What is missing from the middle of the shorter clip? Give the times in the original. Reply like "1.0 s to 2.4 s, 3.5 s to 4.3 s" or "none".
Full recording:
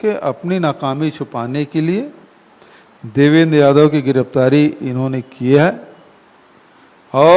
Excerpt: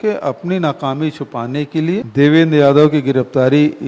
2.1 s to 3.1 s